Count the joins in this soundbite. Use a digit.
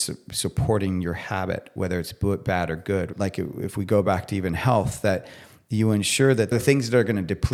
2